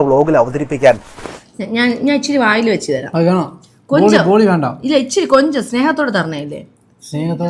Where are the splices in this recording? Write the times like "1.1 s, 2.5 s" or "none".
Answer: 1.1 s